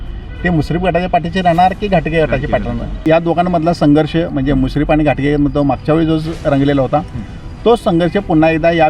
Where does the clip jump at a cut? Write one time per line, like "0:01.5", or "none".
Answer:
0:03.0